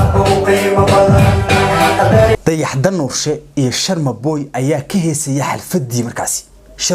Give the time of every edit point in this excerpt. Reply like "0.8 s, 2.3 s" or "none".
2.4 s